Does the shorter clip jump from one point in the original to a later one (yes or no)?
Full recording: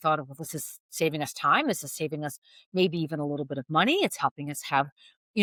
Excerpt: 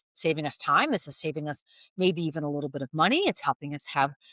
no